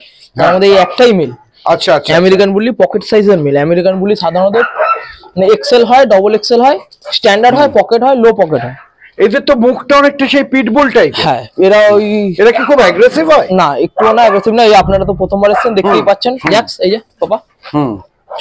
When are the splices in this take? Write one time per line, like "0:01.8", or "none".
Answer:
none